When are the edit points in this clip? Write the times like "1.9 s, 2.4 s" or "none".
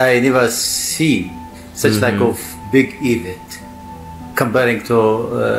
none